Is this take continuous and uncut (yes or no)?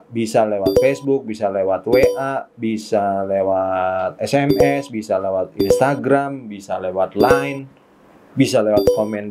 yes